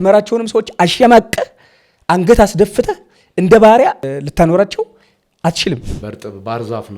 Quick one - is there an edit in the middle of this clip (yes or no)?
yes